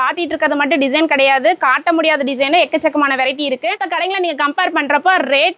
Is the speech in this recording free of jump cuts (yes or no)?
no